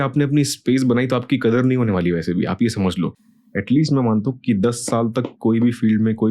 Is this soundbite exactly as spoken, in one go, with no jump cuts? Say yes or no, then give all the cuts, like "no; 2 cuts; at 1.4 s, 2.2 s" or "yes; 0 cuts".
no; 1 cut; at 3.1 s